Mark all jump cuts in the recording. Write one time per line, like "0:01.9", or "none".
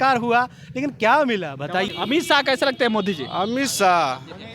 0:01.9